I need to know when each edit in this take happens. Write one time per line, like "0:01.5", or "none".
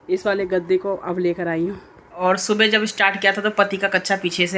0:02.2